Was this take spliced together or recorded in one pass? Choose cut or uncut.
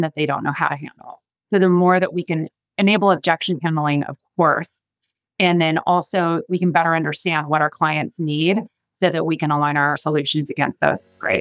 cut